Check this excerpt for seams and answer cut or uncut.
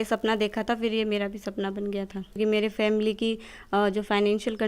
cut